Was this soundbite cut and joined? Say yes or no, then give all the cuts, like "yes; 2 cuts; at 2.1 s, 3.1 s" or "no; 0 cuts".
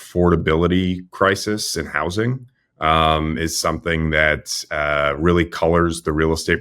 no; 0 cuts